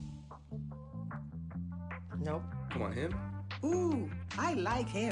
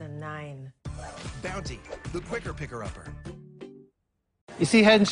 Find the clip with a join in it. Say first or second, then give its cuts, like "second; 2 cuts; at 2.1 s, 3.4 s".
second; 1 cut; at 4.2 s